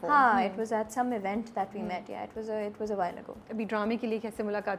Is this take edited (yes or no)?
no